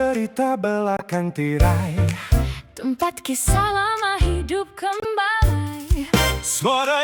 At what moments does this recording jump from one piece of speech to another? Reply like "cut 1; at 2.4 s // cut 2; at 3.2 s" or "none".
none